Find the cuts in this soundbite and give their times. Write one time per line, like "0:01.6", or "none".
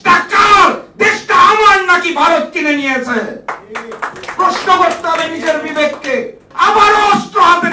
0:06.5

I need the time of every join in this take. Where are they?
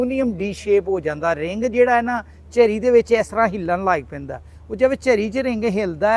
none

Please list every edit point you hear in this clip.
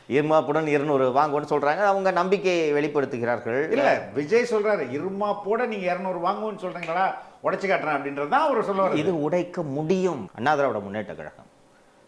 0:10.3

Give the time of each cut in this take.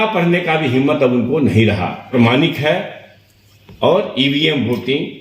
0:02.1

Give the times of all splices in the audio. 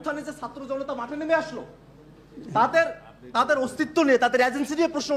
none

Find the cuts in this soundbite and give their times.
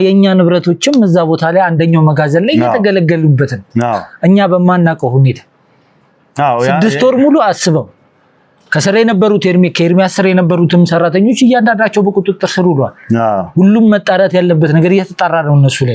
none

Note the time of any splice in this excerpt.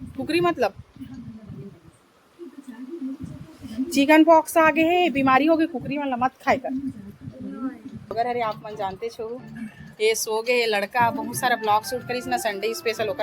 0:02.6
0:08.1

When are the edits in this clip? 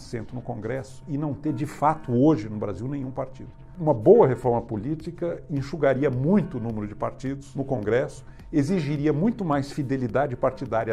0:03.7
0:07.5

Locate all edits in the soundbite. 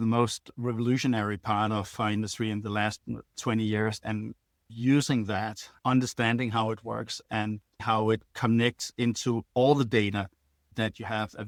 none

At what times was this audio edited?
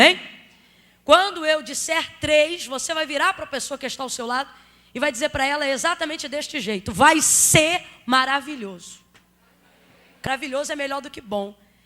0:10.3

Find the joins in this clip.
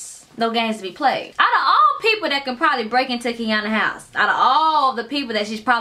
0:01.3

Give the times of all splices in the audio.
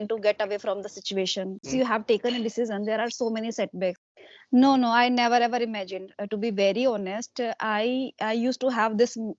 0:01.6
0:04.0

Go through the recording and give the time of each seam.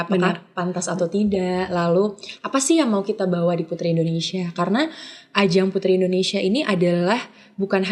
none

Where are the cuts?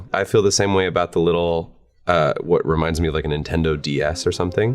none

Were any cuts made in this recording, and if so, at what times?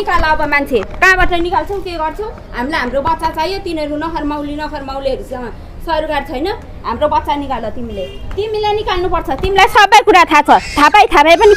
none

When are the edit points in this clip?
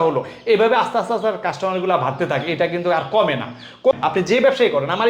0:04.0

